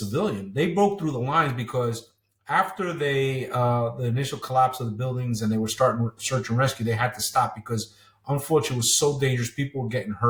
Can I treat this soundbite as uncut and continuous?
yes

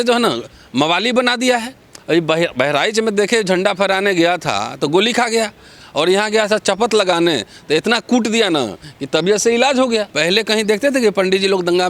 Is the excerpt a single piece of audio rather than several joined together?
no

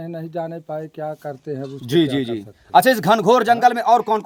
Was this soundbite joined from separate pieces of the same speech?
no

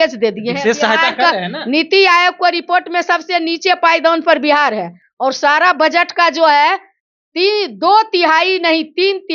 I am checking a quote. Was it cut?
no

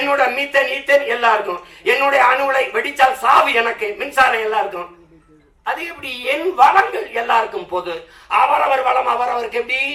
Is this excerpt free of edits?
yes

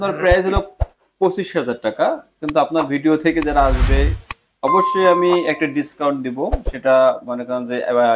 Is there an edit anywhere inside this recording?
no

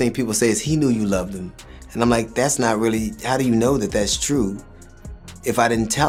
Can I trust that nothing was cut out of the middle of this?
yes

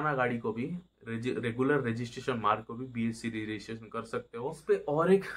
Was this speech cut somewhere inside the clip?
no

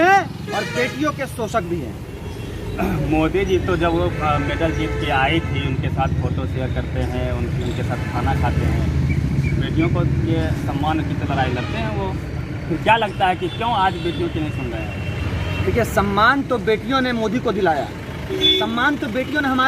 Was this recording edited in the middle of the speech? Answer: no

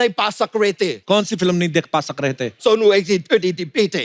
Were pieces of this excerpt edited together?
yes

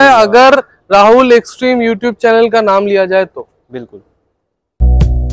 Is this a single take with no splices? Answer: yes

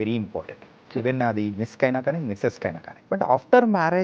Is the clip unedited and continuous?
no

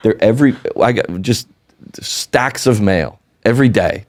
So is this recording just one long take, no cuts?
yes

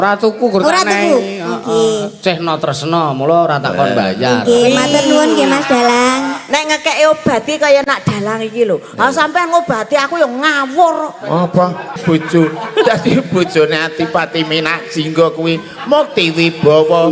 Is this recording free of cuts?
no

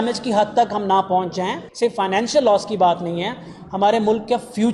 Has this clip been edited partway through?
yes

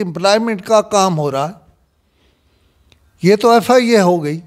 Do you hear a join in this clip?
no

